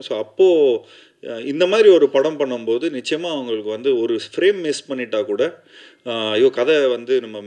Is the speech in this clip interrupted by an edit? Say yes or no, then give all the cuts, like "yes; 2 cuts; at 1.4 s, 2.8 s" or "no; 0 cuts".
no; 0 cuts